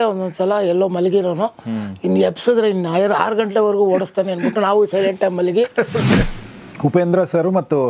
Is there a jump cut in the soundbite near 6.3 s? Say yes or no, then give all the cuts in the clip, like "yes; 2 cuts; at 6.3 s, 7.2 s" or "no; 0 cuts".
yes; 1 cut; at 6.3 s